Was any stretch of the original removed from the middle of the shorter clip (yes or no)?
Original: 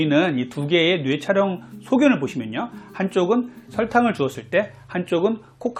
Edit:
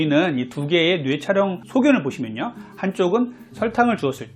yes